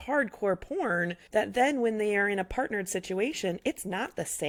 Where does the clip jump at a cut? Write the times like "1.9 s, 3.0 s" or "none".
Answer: none